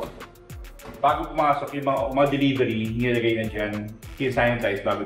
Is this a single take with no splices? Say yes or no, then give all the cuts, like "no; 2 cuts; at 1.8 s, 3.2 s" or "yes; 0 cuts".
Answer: yes; 0 cuts